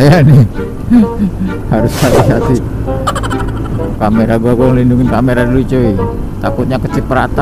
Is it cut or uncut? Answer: cut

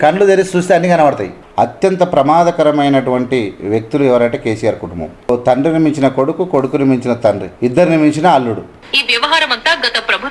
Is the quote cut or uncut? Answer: cut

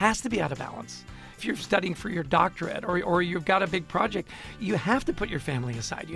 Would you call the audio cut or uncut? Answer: cut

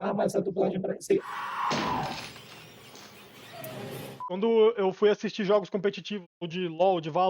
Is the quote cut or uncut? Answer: cut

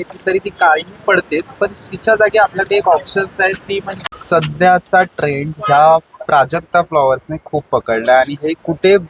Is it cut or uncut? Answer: cut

